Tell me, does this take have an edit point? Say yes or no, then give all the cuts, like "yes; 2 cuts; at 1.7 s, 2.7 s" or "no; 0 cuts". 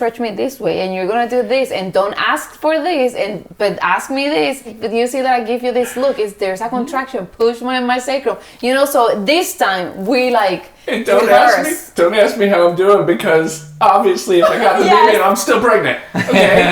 no; 0 cuts